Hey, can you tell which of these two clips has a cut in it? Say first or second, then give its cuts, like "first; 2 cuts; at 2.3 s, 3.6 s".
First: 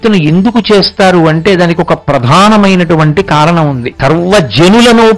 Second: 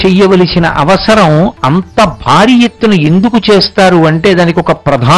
first; 1 cut; at 3.9 s